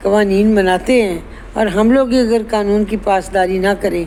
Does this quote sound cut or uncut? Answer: uncut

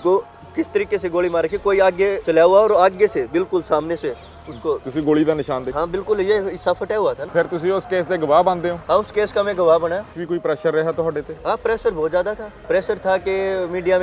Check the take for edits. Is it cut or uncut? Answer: cut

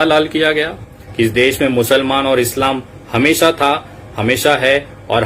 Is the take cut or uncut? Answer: cut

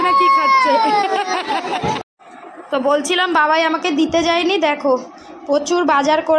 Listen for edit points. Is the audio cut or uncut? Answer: cut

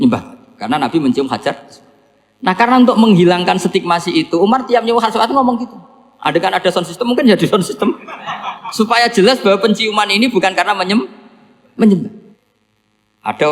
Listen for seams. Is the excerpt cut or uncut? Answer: cut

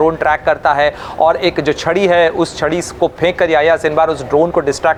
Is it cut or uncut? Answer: uncut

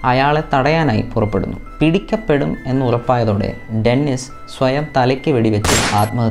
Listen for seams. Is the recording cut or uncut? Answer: cut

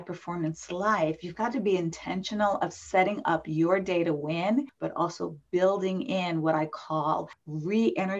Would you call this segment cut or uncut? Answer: uncut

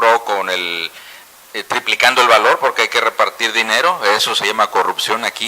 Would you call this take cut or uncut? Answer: cut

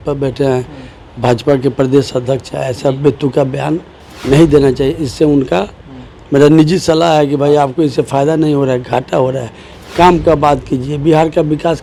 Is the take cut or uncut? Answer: uncut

